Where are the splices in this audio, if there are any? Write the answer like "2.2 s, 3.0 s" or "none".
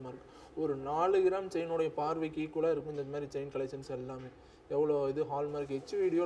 none